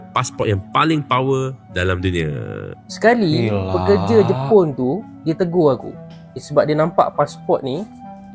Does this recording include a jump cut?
yes; 1 cut; at 2.4 s

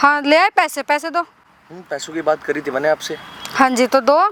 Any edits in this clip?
no; 0 cuts

